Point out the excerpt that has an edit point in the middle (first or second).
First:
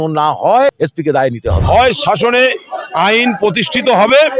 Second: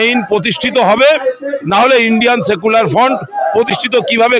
first